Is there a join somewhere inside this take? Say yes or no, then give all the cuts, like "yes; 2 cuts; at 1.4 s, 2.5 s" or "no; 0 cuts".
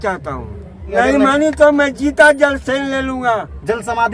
yes; 1 cut; at 0.9 s